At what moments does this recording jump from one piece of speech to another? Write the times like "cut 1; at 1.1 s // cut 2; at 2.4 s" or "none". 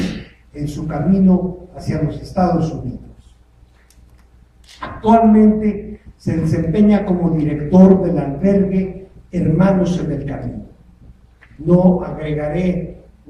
none